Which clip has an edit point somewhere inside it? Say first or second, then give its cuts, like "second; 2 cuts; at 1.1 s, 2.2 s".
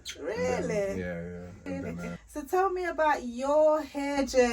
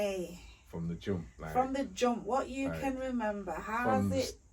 first; 1 cut; at 2.2 s